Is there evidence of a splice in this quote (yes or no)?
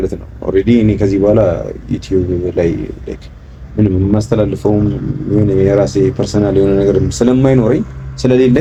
no